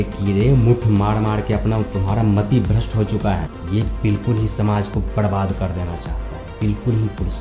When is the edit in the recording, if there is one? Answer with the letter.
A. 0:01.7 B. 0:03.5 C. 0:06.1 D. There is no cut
B